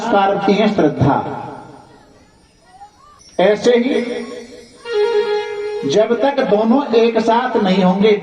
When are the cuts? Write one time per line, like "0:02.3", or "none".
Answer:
0:03.2